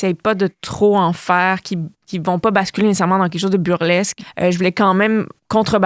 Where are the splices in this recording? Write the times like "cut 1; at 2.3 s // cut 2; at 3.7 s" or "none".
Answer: cut 1; at 4.2 s